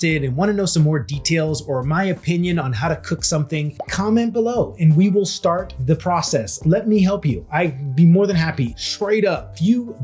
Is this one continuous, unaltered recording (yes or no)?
yes